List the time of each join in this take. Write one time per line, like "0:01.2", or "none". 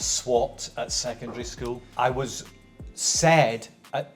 0:01.9